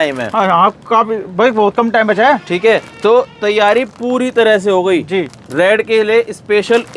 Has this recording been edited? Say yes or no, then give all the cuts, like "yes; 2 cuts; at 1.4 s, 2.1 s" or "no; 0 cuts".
no; 0 cuts